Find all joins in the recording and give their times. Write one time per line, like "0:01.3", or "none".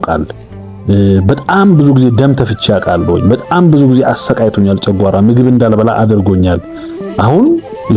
none